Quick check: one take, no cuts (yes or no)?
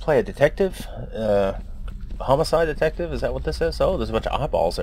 yes